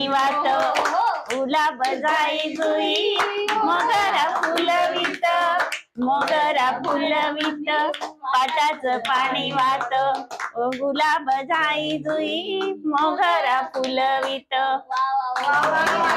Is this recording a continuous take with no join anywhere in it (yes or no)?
yes